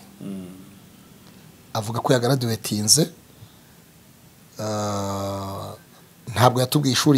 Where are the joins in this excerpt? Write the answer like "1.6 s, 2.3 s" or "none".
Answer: none